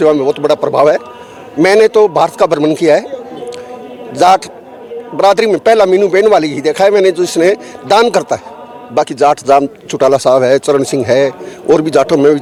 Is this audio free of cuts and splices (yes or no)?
yes